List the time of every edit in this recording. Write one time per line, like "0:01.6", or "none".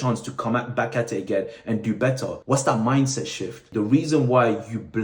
0:02.3
0:03.7